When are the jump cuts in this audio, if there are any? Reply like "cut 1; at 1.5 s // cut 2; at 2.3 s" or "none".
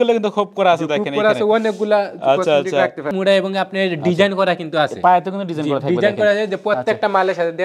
cut 1; at 3.1 s